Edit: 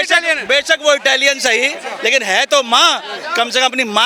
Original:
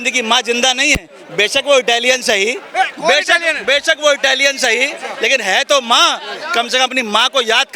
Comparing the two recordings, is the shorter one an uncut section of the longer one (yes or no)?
yes